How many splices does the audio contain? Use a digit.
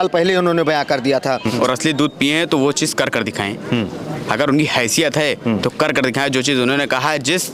1